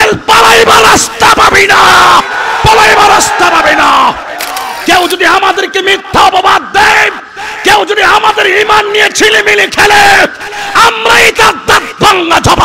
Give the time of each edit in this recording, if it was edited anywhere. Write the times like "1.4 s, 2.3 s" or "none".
4.7 s